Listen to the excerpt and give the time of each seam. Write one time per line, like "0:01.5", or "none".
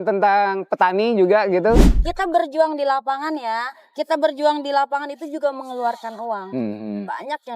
0:01.9